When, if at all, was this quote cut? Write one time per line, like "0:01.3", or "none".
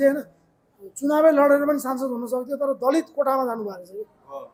none